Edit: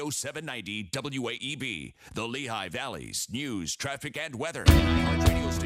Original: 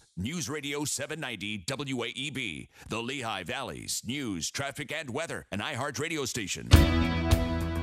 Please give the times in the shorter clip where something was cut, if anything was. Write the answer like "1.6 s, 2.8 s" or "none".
4.6 s